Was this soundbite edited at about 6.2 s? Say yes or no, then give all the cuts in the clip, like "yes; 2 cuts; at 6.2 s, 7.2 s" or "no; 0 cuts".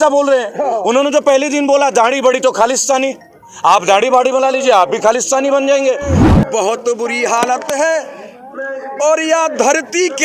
yes; 1 cut; at 6.2 s